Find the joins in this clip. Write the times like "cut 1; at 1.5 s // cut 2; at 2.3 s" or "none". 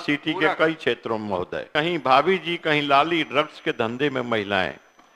cut 1; at 1.6 s